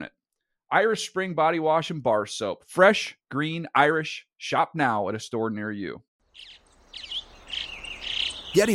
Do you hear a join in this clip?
yes; 1 cut; at 6.1 s

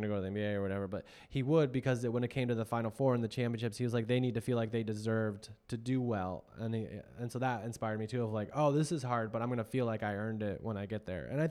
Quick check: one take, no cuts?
yes; 0 cuts

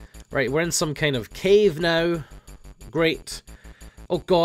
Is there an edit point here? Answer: yes; 1 cut; at 2.0 s

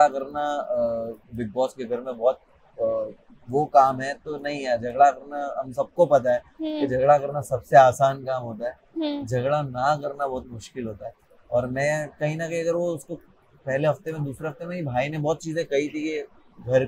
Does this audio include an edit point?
no; 0 cuts

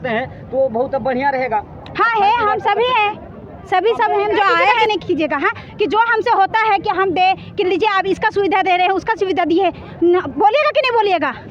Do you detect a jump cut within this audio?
yes; 1 cut; at 4.9 s

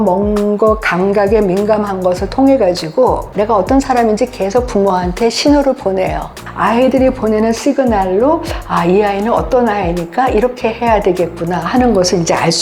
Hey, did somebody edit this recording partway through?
yes; 1 cut; at 3.2 s

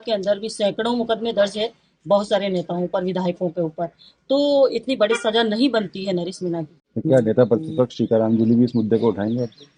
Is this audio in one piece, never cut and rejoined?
yes; 0 cuts

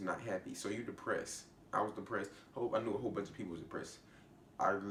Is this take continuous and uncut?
yes; 0 cuts

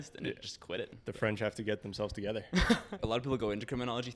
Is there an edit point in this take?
yes; 2 cuts; at 1.0 s, 3.0 s

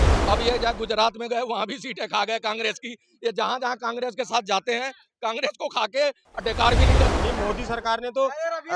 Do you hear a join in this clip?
yes; 1 cut; at 7.1 s

